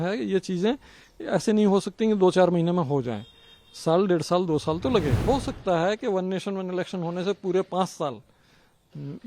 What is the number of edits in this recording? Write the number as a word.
one